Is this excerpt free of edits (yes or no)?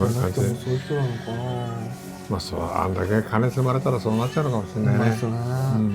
yes